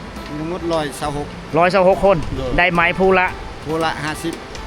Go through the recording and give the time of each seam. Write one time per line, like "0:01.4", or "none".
none